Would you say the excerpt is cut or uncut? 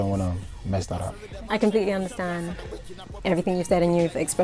uncut